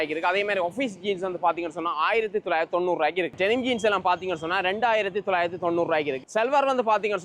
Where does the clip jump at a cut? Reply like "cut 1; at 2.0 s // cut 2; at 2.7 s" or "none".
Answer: cut 1; at 3.4 s // cut 2; at 6.2 s